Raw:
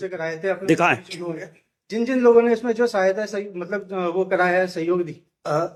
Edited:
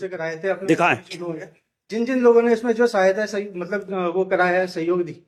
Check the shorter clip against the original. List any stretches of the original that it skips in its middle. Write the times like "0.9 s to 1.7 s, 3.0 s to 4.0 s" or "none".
none